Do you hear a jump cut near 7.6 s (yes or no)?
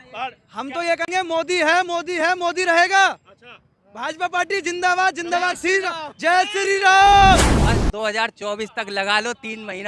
yes